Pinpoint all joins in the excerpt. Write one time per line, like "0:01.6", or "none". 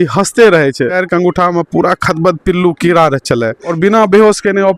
0:00.9
0:03.6